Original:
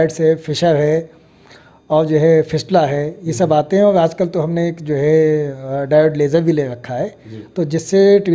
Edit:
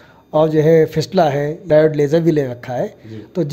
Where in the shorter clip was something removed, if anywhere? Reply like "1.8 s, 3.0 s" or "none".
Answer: 1.6 s